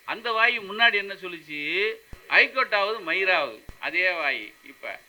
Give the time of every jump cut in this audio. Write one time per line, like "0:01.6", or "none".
0:02.1
0:03.7